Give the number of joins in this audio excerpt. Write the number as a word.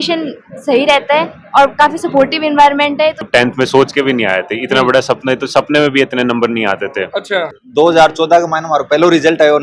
two